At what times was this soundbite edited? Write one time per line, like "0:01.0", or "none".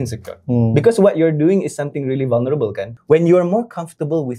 0:02.9